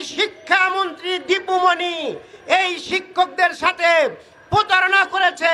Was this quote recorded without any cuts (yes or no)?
yes